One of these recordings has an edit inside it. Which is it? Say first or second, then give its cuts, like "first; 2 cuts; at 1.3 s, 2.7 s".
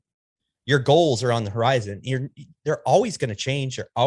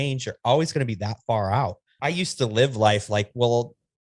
second; 1 cut; at 1.9 s